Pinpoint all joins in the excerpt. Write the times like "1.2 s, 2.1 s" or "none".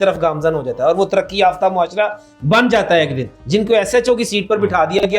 3.3 s